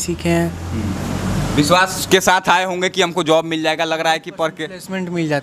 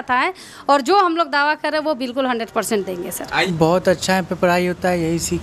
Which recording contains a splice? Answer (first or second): second